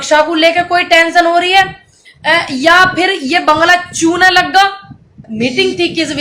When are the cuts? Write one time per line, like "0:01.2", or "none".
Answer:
0:05.2